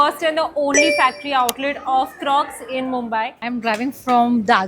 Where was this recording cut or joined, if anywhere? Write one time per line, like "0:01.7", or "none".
0:03.4